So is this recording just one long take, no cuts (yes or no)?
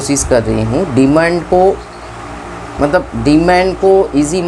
yes